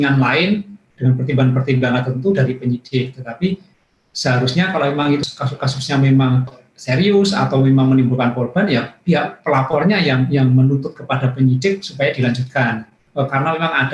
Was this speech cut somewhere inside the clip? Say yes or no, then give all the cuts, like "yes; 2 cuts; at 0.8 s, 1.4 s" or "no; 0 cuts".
yes; 3 cuts; at 5.3 s, 6.6 s, 13.0 s